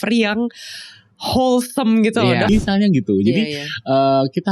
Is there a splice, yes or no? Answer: yes